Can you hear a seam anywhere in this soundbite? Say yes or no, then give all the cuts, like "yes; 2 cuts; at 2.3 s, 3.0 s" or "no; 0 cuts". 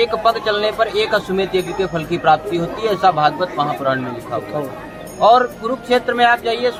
no; 0 cuts